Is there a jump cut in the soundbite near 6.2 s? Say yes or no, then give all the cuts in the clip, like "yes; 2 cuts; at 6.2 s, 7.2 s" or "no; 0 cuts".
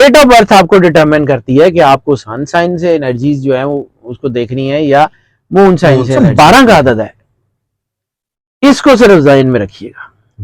yes; 1 cut; at 6.2 s